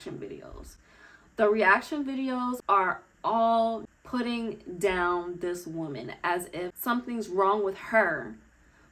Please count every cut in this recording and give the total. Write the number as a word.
three